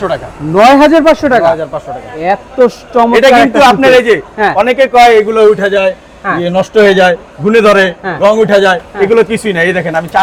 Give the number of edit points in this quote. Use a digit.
0